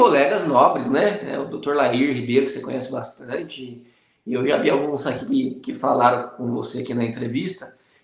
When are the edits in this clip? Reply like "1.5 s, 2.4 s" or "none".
none